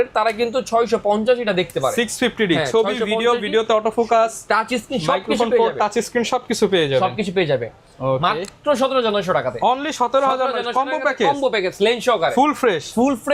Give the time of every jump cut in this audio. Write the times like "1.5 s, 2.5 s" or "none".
none